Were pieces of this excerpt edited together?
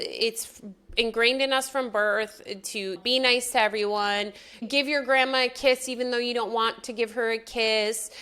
yes; 1 cut; at 4.7 s

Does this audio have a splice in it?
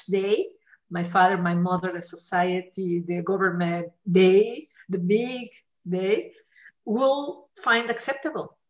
no; 0 cuts

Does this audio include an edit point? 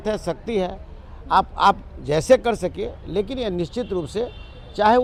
no; 0 cuts

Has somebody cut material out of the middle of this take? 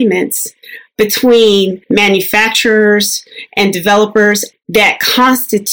yes; 2 cuts; at 1.8 s, 4.5 s

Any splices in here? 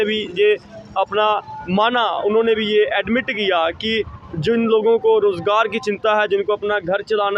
no; 0 cuts

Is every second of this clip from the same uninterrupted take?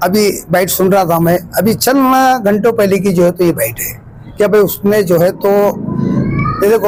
yes; 0 cuts

